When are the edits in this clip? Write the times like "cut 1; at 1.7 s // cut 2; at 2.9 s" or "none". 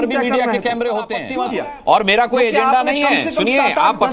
cut 1; at 1.5 s